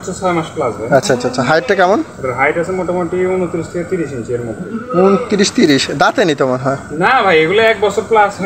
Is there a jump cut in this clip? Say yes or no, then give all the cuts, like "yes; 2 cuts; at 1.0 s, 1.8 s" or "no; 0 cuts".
no; 0 cuts